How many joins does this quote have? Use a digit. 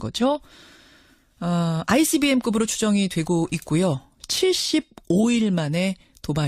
1